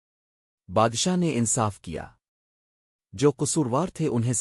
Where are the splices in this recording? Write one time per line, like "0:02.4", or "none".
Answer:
none